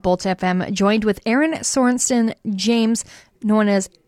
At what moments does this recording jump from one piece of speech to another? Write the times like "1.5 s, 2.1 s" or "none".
none